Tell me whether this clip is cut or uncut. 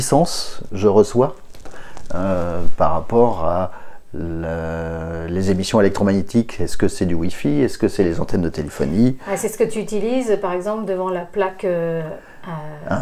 uncut